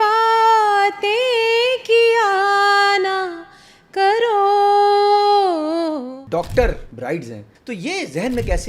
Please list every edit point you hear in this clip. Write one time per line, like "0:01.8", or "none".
0:06.1
0:07.4